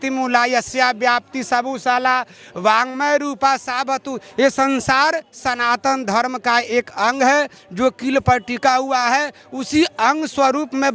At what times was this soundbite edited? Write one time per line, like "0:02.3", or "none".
none